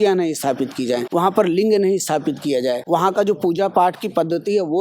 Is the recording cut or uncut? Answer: cut